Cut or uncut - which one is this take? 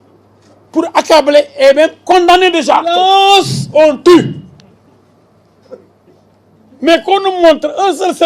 cut